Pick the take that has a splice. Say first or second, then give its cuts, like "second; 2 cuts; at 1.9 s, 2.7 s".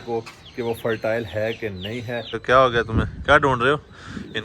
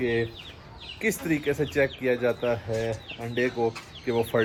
first; 1 cut; at 2.4 s